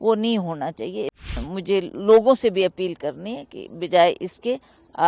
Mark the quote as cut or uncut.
cut